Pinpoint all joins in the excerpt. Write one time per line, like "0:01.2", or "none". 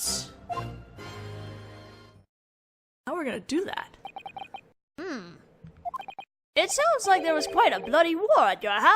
0:01.2